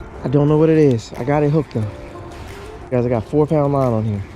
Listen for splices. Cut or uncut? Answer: cut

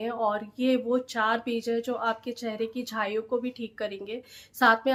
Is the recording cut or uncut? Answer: uncut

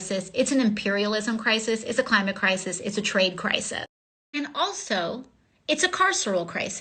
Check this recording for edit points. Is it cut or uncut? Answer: cut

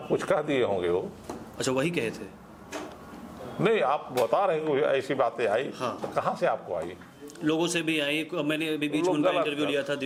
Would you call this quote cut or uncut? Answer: uncut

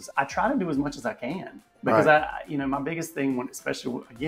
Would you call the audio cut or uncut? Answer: uncut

